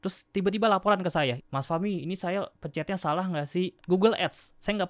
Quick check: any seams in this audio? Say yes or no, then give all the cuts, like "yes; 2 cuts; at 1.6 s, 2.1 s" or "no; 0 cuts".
yes; 2 cuts; at 1.4 s, 3.8 s